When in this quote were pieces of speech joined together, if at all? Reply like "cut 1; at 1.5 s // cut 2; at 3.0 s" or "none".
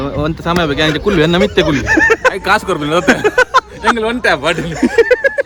none